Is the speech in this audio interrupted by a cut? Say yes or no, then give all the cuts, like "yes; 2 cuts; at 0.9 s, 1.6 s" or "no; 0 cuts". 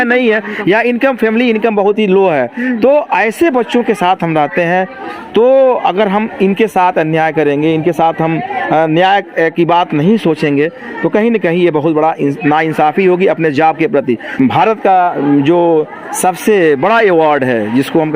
yes; 1 cut; at 14.3 s